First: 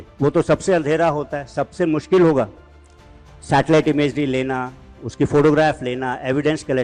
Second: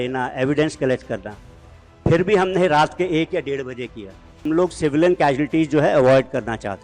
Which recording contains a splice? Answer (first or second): second